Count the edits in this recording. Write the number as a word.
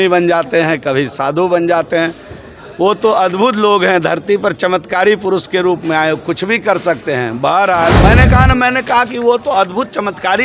one